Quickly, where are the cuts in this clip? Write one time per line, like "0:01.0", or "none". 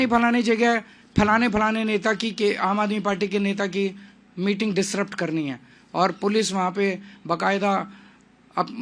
none